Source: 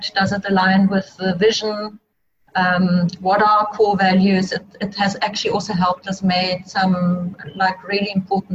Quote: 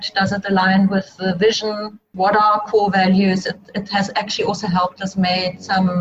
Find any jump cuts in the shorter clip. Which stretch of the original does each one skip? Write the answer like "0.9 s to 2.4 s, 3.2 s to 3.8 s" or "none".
2.1 s to 3.2 s